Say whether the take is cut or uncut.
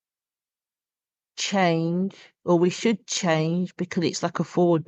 uncut